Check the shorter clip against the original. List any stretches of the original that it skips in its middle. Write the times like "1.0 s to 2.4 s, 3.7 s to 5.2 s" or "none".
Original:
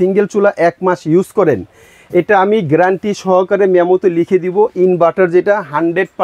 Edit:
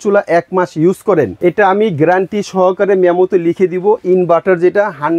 1.6 s to 2.0 s